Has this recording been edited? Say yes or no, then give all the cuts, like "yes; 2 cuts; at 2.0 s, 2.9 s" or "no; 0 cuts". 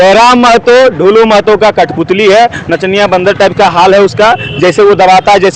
no; 0 cuts